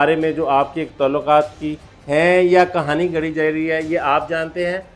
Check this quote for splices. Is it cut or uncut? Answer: uncut